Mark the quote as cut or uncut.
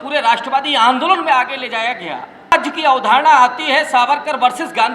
cut